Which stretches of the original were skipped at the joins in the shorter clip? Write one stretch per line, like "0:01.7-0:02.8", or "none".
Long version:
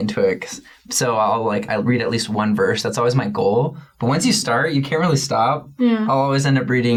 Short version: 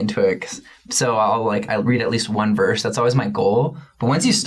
none